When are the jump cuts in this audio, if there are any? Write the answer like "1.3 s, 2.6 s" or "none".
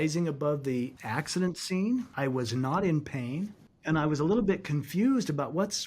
1.0 s, 2.1 s